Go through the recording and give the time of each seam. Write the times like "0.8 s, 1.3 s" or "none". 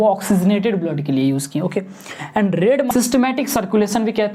2.9 s

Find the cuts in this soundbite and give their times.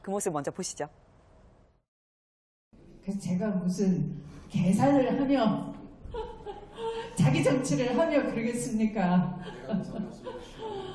7.9 s

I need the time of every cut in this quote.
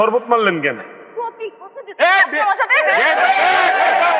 none

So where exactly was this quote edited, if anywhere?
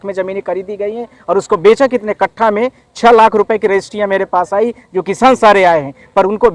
none

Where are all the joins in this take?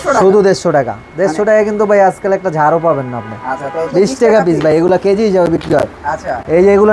3.8 s

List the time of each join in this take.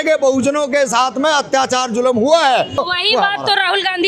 2.8 s

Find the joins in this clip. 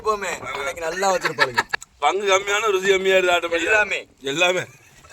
2.1 s

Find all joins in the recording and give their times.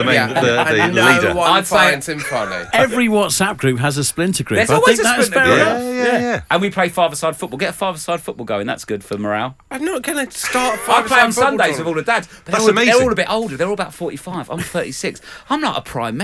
2.6 s, 9.7 s

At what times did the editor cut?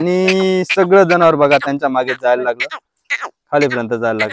none

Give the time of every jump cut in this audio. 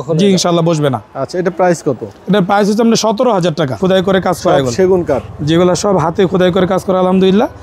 3.8 s

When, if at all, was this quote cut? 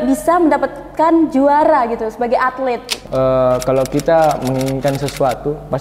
3.0 s

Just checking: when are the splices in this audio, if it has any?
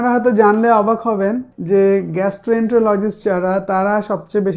none

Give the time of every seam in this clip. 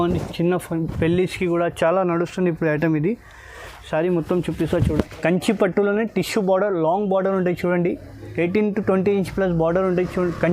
4.8 s

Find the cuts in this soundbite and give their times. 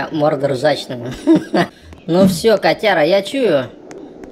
1.7 s

